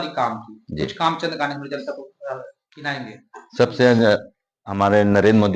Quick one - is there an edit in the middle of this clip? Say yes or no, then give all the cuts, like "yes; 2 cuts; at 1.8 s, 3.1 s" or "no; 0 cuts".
no; 0 cuts